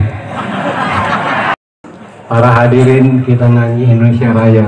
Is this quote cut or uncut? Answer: cut